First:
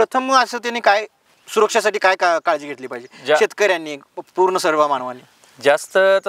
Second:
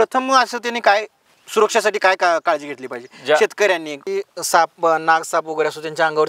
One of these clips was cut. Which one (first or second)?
second